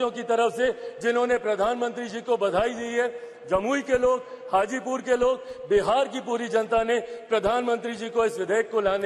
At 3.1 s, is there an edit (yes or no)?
no